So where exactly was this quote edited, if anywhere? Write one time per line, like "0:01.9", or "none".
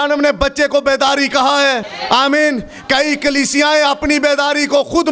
0:01.9